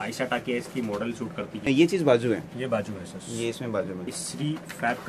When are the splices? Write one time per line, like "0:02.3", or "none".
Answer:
0:01.6
0:04.2